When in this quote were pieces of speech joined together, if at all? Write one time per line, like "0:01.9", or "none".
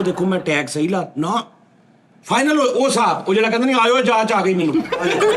none

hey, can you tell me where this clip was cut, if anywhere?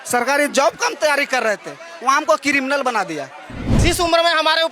0:03.8

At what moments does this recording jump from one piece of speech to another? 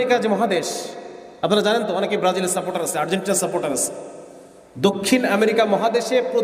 none

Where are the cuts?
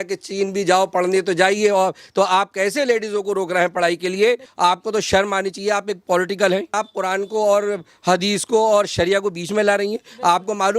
0:04.5
0:06.7

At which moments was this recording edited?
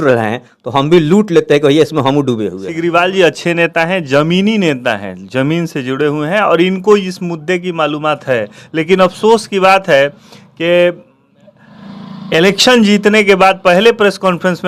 0:02.6

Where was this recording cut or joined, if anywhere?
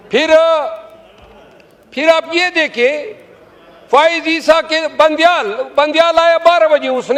none

